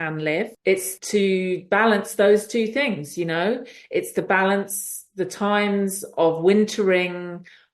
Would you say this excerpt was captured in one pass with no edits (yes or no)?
no